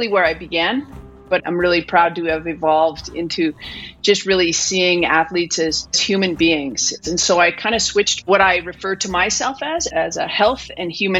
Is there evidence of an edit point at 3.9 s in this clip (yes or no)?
no